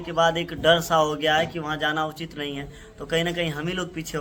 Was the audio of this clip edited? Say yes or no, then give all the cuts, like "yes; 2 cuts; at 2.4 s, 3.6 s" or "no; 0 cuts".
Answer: no; 0 cuts